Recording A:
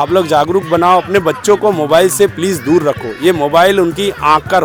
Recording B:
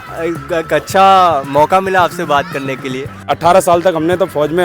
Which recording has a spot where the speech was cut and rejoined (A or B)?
B